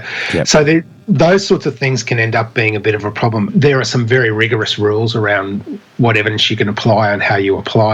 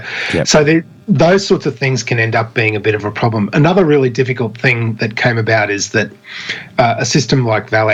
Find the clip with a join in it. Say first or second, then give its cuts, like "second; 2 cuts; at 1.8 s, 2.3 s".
first; 1 cut; at 3.5 s